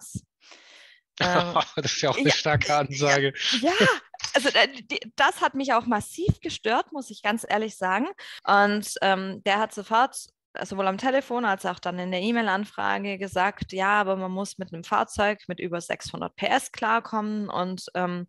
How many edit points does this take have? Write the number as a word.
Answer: one